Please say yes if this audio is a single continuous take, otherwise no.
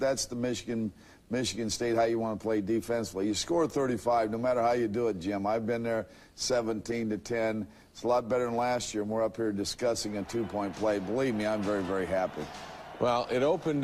yes